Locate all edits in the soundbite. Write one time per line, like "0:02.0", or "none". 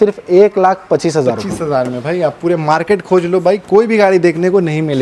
none